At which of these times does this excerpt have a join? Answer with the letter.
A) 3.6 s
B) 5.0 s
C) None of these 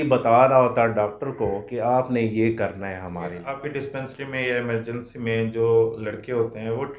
A